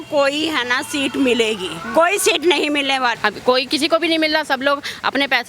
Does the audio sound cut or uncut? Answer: cut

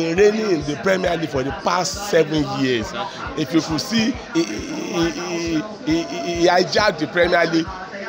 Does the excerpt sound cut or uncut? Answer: uncut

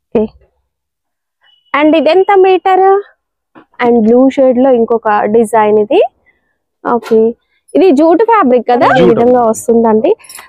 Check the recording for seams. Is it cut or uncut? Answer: cut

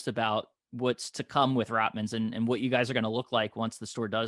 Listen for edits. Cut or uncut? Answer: uncut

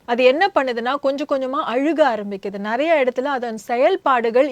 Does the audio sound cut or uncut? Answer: uncut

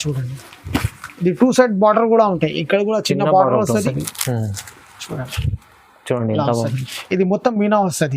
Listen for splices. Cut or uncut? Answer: cut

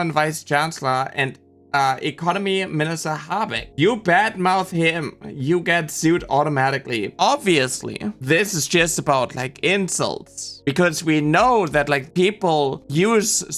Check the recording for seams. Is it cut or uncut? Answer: cut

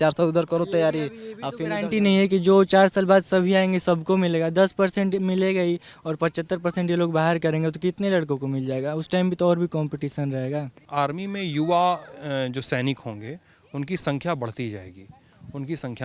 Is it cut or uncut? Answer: cut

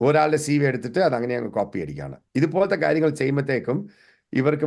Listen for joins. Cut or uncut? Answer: uncut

